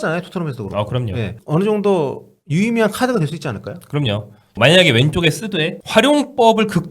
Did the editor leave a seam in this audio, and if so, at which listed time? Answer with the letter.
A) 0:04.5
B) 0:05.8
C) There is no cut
A